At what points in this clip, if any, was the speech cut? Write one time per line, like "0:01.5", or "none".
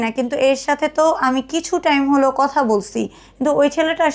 none